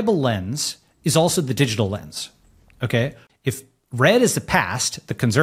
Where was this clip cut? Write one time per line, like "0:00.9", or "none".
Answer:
0:03.2